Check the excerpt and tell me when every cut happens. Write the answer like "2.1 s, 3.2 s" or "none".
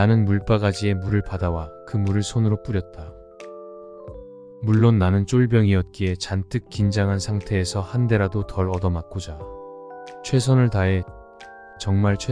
2.9 s, 4.6 s